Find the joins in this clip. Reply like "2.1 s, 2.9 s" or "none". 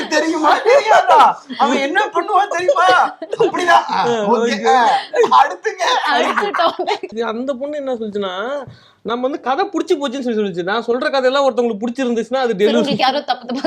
7.1 s